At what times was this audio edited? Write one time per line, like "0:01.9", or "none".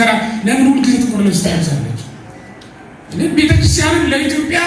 none